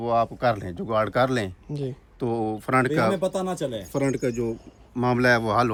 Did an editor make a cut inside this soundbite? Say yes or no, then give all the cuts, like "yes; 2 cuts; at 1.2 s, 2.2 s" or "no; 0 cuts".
no; 0 cuts